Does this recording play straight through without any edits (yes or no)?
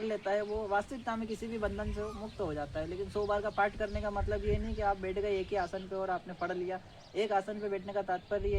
yes